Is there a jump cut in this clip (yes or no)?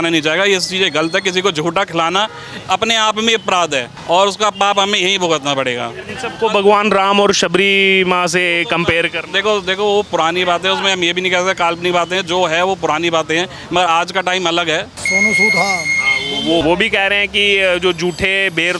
yes